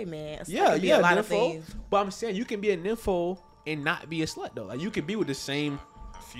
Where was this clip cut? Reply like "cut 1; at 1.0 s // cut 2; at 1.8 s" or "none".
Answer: none